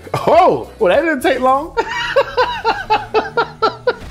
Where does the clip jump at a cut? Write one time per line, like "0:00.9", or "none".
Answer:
none

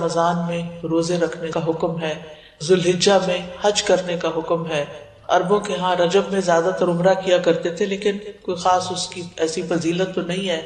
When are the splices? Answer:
none

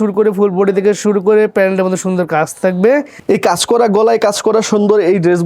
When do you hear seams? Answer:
0:03.2

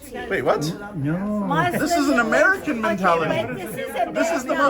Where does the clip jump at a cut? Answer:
none

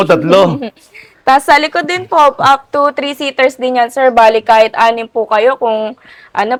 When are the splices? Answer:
none

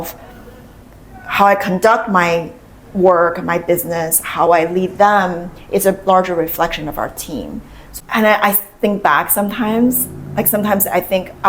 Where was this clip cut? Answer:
0:07.9

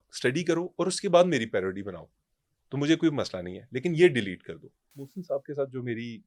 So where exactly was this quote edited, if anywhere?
0:05.0

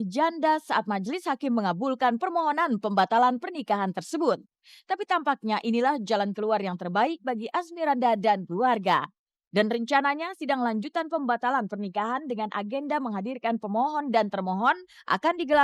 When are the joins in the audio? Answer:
none

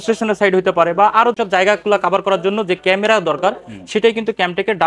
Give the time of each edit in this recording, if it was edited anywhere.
0:01.4

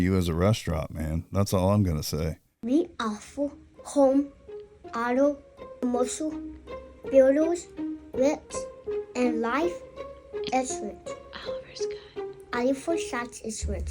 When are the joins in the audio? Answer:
0:02.5

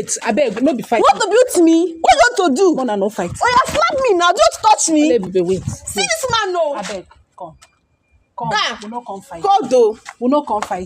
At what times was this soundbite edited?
none

